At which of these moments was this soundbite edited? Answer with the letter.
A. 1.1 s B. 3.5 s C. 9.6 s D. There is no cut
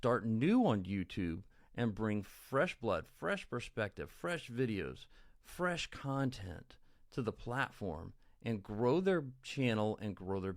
D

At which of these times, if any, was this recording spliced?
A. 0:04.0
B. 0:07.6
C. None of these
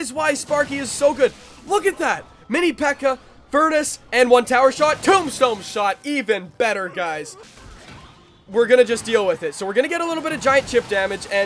B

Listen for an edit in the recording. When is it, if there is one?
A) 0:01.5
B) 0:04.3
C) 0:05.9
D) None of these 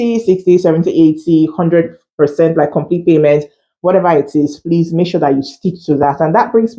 D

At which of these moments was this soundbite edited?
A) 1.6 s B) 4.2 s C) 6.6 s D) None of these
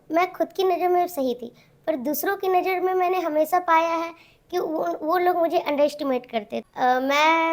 C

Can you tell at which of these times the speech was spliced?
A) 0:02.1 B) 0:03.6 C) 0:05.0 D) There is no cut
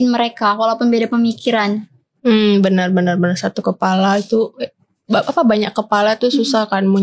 D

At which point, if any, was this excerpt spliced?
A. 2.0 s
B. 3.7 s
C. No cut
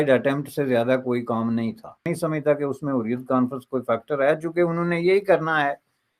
A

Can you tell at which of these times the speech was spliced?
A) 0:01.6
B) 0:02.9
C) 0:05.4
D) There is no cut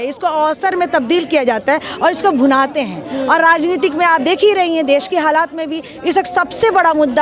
D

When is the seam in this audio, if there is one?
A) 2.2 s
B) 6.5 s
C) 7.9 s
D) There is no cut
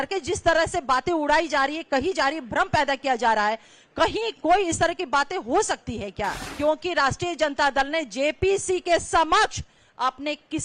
B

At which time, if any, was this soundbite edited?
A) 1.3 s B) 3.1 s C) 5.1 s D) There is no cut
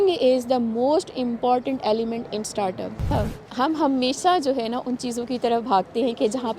B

